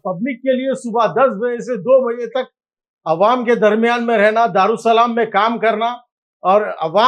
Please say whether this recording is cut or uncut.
uncut